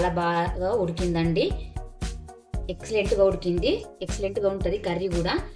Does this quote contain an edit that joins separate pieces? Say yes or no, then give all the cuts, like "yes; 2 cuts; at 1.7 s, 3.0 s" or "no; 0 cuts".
no; 0 cuts